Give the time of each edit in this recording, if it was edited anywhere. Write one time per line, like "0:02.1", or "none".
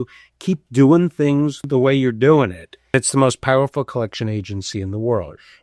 0:01.6
0:02.9